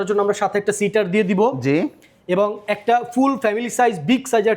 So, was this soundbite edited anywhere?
no; 0 cuts

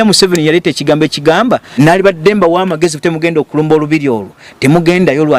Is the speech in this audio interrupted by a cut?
yes; 1 cut; at 1.7 s

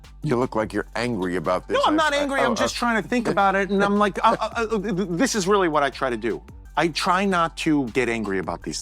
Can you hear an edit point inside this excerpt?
yes; 1 cut; at 6.3 s

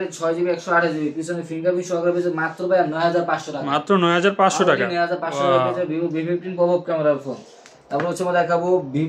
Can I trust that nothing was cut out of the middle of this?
yes; 0 cuts

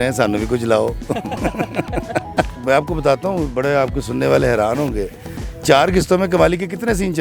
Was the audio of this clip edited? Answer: no; 0 cuts

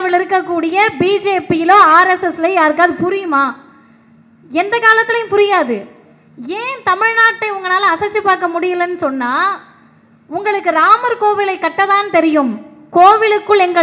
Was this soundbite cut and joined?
no; 0 cuts

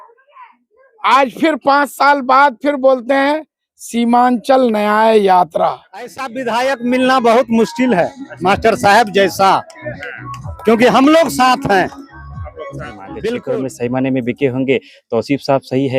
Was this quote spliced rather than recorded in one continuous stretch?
yes; 2 cuts; at 6.3 s, 13.5 s

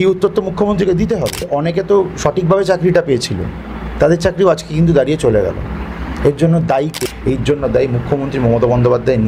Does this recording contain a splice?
yes; 2 cuts; at 1.5 s, 6.9 s

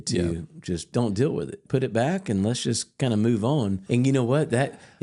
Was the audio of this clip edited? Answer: yes; 3 cuts; at 0.9 s, 1.6 s, 3.8 s

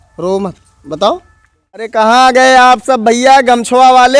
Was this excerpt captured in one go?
no; 1 cut; at 1.9 s

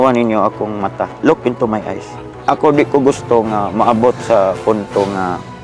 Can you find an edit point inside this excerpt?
no; 0 cuts

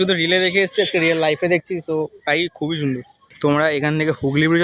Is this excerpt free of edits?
no; 1 cut; at 3.2 s

